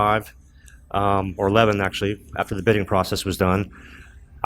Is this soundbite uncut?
yes; 0 cuts

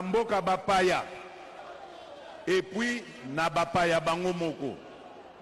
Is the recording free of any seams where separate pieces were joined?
yes; 0 cuts

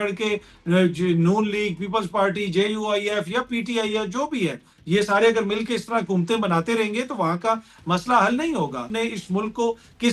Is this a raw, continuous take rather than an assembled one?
no; 1 cut; at 8.9 s

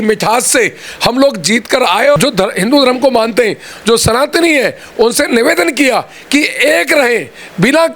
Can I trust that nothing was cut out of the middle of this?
no; 1 cut; at 2.2 s

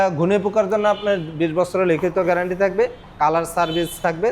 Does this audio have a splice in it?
no; 0 cuts

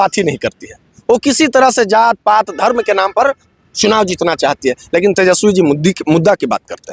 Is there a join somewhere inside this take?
no; 0 cuts

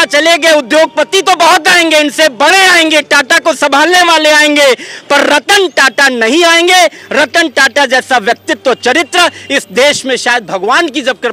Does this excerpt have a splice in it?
no; 0 cuts

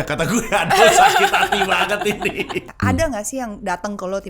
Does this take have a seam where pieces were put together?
yes; 1 cut; at 2.7 s

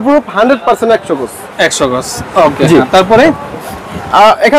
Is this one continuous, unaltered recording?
yes; 0 cuts

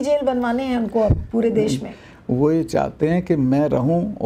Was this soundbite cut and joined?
no; 0 cuts

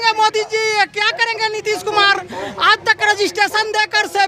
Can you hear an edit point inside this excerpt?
no; 0 cuts

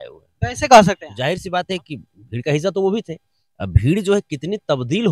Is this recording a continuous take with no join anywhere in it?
no; 1 cut; at 1.1 s

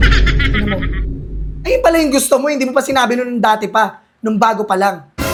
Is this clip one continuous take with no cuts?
yes; 0 cuts

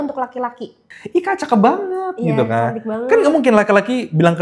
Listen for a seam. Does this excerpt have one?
yes; 1 cut; at 0.9 s

